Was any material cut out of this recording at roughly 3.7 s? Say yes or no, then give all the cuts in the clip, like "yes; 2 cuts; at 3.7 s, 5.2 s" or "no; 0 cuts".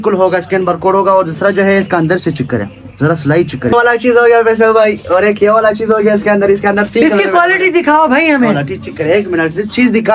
yes; 1 cut; at 3.7 s